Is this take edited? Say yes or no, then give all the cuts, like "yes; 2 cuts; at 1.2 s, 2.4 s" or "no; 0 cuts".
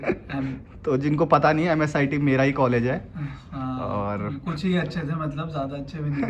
no; 0 cuts